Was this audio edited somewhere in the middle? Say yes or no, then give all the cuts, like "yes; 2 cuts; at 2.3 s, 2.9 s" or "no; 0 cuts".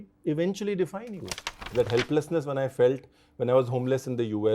yes; 1 cut; at 1.7 s